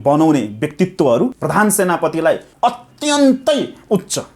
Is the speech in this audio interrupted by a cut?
yes; 2 cuts; at 1.4 s, 2.5 s

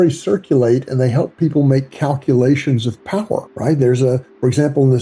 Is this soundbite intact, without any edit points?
no; 1 cut; at 3.5 s

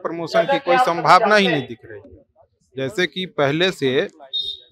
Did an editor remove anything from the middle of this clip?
no; 0 cuts

